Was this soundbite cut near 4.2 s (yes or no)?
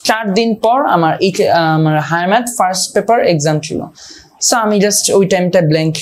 no